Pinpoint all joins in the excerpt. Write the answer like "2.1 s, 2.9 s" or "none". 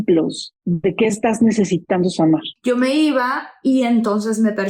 2.5 s